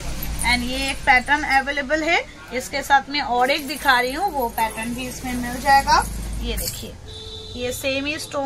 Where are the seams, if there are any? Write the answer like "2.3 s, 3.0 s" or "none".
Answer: none